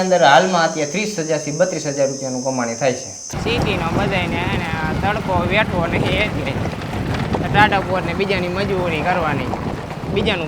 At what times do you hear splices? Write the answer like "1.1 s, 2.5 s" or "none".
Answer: 3.2 s